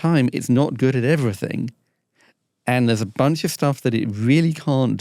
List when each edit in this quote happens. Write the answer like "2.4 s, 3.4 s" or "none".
none